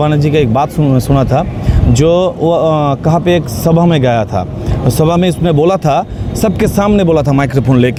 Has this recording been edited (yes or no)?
no